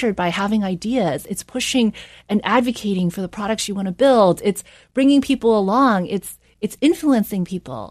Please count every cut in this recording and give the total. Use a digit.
0